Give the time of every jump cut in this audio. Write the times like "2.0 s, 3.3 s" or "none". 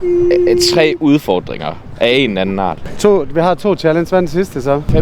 2.8 s